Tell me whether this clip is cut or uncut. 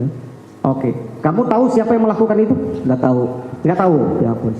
uncut